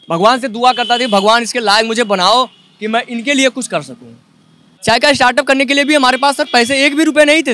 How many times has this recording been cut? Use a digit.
1